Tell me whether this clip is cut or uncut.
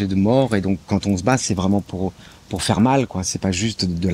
uncut